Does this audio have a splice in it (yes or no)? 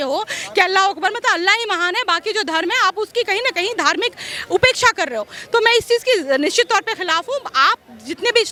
no